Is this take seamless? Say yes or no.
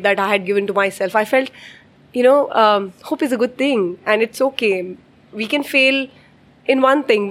yes